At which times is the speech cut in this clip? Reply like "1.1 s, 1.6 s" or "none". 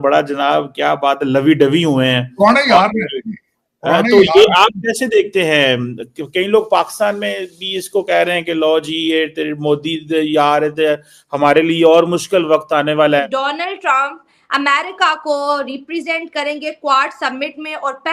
13.3 s